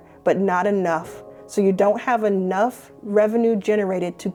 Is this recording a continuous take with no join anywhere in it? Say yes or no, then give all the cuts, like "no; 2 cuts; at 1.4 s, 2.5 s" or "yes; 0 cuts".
yes; 0 cuts